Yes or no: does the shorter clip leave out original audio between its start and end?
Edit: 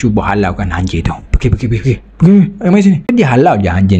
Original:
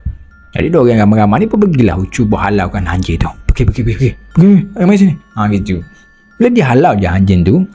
yes